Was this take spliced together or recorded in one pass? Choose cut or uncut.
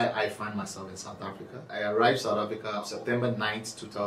cut